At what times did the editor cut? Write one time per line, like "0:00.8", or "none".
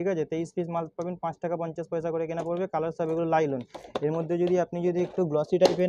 none